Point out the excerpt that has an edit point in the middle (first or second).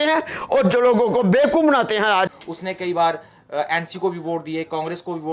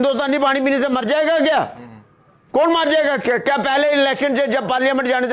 first